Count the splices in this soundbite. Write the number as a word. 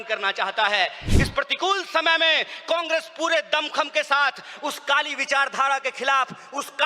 one